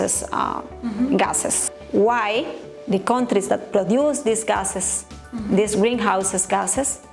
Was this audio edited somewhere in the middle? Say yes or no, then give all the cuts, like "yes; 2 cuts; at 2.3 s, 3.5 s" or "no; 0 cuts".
yes; 1 cut; at 1.6 s